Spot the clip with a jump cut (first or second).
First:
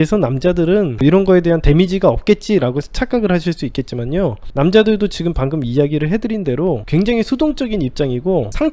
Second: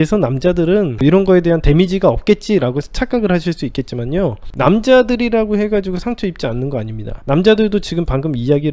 first